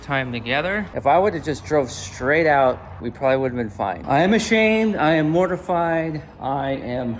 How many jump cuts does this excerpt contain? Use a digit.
2